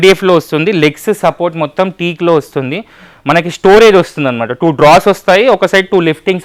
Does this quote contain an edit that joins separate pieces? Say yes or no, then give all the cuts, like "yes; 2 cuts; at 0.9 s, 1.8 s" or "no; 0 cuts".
no; 0 cuts